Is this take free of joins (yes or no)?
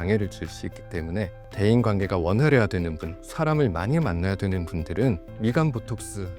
no